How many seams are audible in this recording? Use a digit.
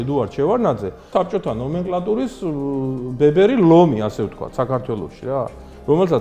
1